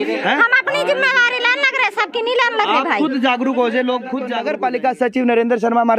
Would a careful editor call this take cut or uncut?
cut